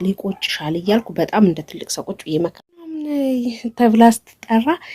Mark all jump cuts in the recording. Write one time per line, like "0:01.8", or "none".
0:03.0